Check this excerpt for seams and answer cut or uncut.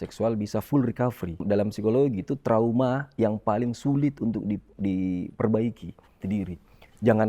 cut